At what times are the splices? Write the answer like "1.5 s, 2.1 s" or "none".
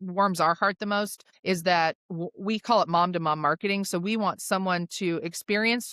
1.2 s